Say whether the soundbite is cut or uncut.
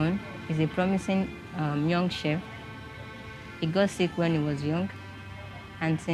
uncut